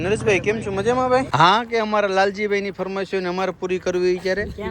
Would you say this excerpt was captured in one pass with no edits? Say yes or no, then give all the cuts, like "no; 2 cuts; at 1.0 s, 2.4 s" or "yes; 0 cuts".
no; 1 cut; at 1.3 s